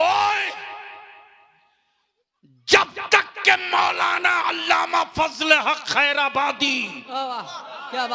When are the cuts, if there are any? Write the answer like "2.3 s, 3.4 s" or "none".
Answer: none